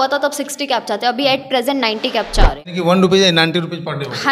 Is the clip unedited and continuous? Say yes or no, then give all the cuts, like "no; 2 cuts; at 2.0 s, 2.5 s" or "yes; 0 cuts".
no; 1 cut; at 2.6 s